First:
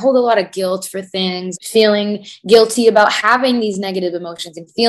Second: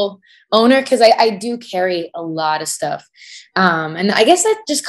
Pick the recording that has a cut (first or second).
first